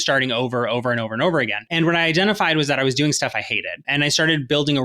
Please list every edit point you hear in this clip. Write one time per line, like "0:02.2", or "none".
0:01.6
0:03.8